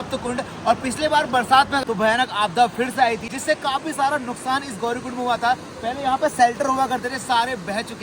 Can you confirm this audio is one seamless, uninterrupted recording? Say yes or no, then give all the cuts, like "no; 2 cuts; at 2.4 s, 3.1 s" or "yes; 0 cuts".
no; 2 cuts; at 1.8 s, 3.3 s